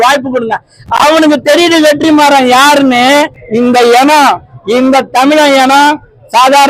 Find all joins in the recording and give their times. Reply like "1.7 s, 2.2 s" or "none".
3.4 s